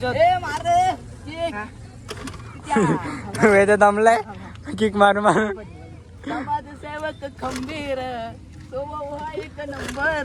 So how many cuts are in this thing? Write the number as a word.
zero